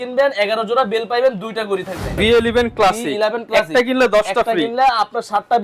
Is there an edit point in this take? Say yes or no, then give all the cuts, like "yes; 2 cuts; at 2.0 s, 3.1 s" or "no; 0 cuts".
yes; 1 cut; at 2.1 s